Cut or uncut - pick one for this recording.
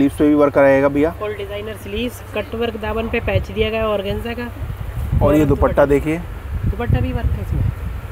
uncut